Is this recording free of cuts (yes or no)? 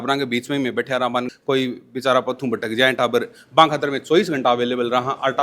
no